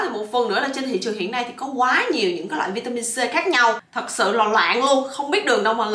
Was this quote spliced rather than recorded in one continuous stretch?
no; 0 cuts

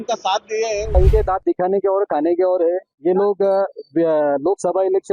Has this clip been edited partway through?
yes; 1 cut; at 0.9 s

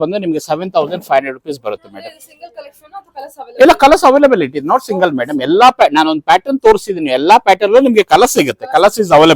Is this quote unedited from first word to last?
yes; 0 cuts

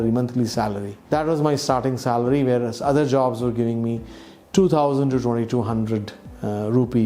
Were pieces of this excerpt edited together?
yes; 1 cut; at 0.9 s

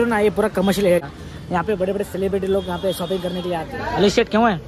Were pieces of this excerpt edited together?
yes; 2 cuts; at 1.0 s, 3.7 s

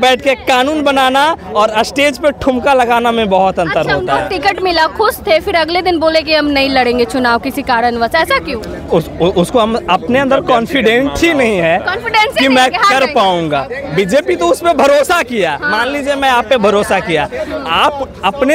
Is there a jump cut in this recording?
no; 0 cuts

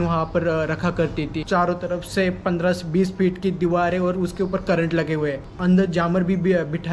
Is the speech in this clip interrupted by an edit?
yes; 2 cuts; at 1.4 s, 5.5 s

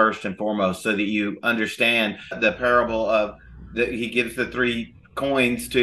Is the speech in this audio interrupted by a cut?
yes; 1 cut; at 2.4 s

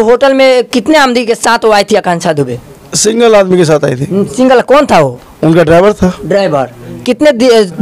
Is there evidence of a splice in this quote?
no; 0 cuts

